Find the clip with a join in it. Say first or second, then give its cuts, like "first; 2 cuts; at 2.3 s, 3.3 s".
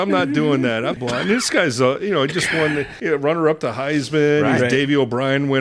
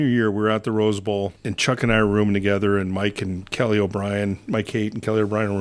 first; 2 cuts; at 1.0 s, 2.9 s